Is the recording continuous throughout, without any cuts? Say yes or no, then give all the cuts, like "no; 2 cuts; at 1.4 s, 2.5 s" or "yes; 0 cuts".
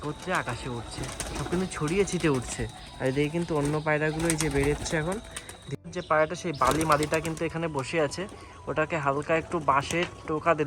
no; 1 cut; at 5.8 s